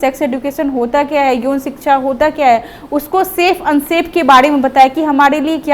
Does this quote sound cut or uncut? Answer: uncut